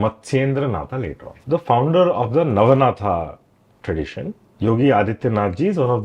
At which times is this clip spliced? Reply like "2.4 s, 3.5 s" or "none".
1.3 s, 4.4 s